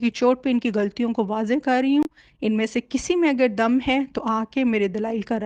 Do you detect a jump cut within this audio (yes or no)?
no